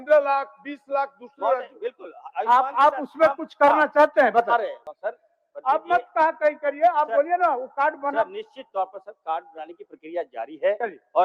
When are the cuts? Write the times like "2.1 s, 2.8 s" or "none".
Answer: 4.9 s